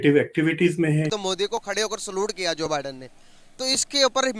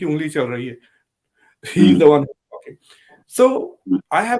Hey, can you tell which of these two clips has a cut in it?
first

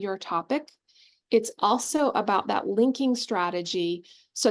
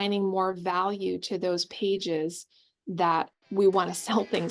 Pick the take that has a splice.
second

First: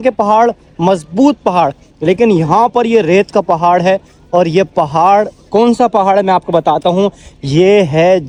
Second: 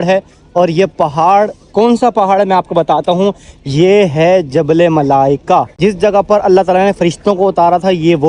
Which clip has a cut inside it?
second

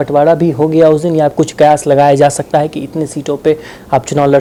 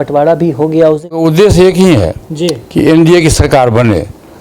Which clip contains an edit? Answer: second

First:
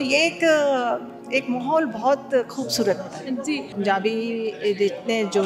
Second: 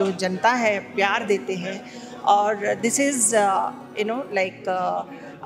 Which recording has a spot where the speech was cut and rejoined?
first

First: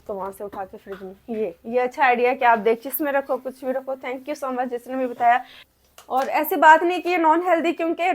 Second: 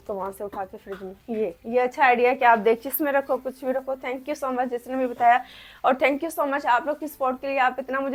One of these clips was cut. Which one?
first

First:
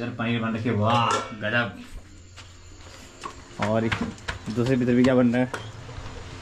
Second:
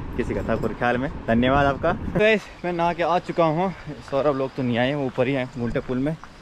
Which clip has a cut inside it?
second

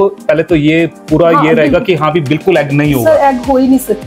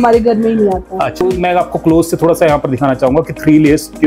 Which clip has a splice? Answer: second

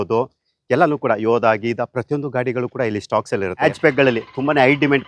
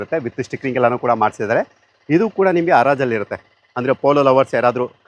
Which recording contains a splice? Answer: first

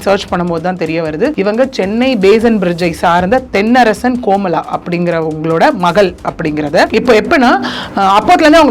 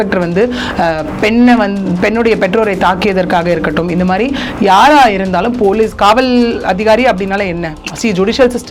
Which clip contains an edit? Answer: first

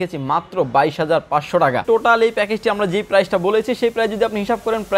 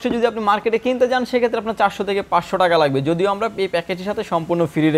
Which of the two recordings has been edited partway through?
first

